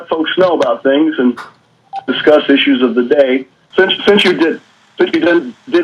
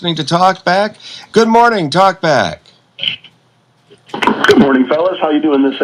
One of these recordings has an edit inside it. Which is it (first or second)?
first